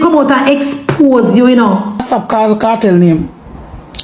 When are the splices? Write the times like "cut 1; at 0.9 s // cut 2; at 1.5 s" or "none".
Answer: cut 1; at 2.0 s